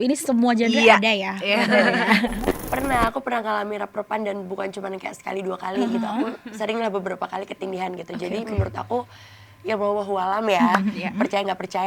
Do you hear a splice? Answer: yes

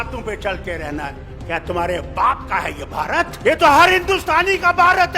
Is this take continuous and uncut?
no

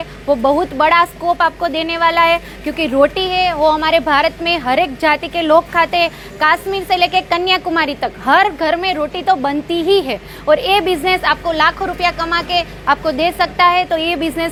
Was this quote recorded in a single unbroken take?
yes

